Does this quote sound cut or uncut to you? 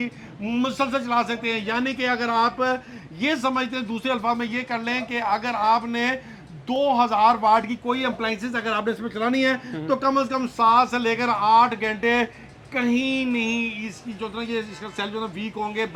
uncut